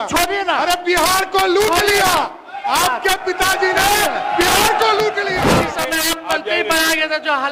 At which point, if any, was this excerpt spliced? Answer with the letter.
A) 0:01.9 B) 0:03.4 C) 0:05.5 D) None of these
C